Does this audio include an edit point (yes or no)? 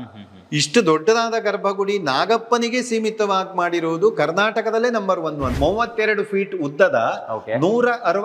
yes